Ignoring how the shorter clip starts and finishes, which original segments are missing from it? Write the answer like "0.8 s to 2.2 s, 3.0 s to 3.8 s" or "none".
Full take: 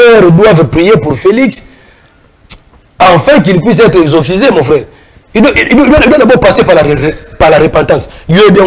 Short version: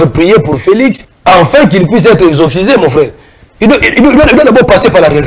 1.7 s to 2.8 s